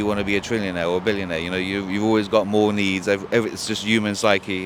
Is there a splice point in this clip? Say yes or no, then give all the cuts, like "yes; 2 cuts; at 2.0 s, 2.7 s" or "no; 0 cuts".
no; 0 cuts